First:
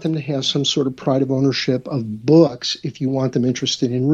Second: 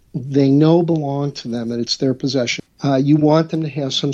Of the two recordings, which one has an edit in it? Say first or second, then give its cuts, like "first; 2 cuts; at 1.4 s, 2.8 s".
second; 1 cut; at 2.6 s